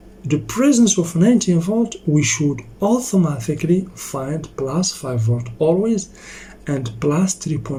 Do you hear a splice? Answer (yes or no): no